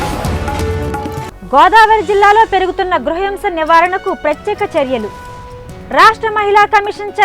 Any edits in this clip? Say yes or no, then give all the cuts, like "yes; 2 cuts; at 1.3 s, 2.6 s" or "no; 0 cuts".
yes; 1 cut; at 1.2 s